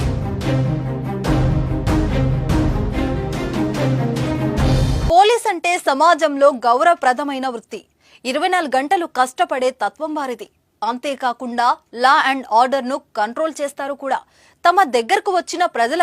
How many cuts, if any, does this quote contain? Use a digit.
1